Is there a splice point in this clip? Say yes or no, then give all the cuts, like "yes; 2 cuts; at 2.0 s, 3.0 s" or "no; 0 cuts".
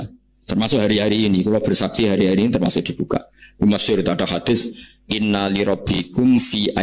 no; 0 cuts